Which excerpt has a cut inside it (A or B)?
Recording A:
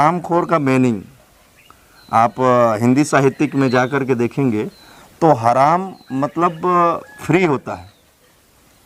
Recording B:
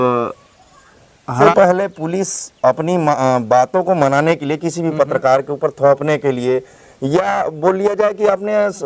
B